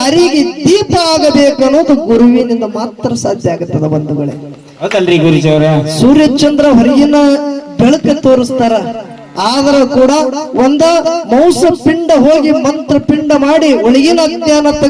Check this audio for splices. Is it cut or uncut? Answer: uncut